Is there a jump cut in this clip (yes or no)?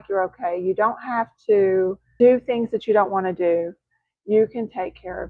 yes